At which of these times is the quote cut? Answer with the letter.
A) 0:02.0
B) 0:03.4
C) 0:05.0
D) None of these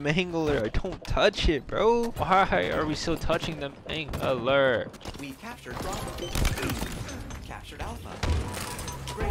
C